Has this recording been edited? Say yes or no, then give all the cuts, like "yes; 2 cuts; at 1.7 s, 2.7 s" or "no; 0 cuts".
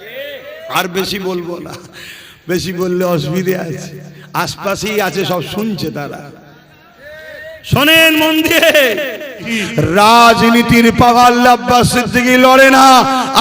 yes; 1 cut; at 9.6 s